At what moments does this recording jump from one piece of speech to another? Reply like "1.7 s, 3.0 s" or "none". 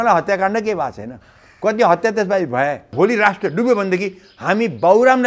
2.9 s